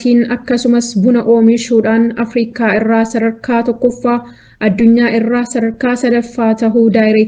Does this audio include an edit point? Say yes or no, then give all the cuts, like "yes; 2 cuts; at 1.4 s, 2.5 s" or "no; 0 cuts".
no; 0 cuts